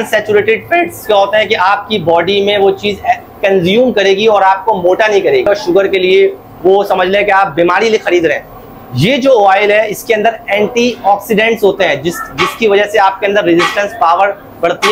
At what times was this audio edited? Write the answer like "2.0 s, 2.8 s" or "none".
5.5 s